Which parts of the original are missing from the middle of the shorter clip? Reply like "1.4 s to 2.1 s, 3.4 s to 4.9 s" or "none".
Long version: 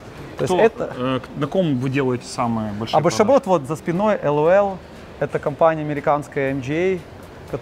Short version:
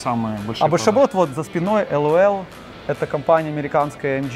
none